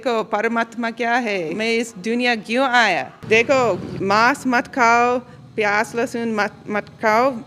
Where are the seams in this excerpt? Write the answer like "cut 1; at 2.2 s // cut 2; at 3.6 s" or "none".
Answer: cut 1; at 1.5 s // cut 2; at 3.1 s // cut 3; at 3.9 s

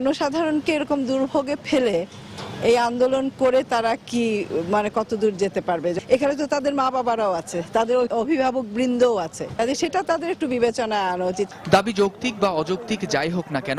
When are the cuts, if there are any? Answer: none

